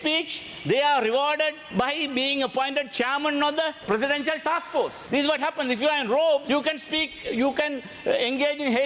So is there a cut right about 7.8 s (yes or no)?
no